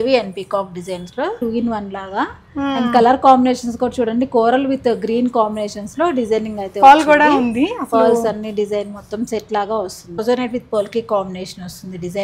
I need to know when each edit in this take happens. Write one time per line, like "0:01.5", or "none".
0:01.4
0:10.2